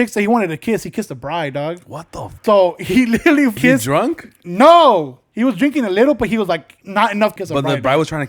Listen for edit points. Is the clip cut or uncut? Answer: cut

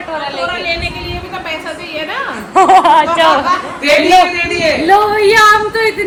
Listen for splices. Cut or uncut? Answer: uncut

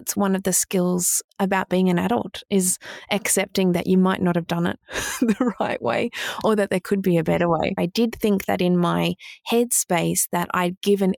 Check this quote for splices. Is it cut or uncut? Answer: cut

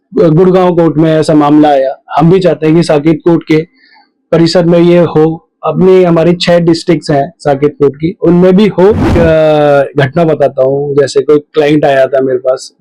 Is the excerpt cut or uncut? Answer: cut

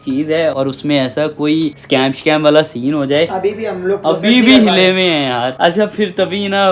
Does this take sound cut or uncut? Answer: uncut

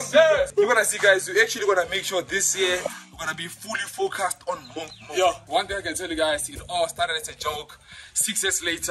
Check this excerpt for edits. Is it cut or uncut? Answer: uncut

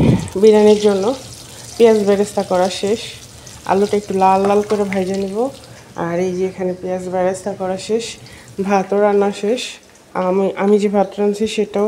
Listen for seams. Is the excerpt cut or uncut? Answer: uncut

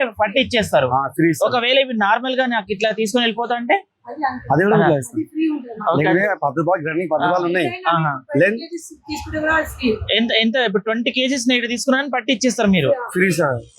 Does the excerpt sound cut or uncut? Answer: uncut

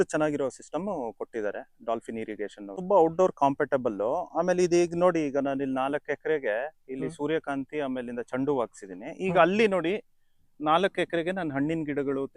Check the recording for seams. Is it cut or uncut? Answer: cut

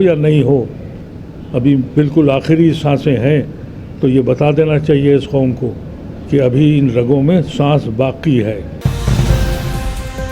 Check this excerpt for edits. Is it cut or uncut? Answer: uncut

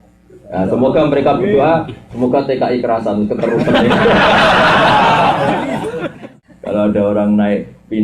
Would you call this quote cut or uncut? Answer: cut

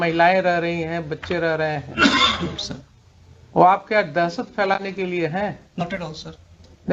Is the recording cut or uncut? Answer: uncut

